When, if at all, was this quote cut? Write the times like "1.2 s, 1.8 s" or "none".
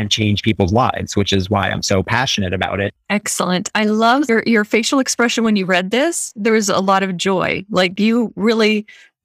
2.9 s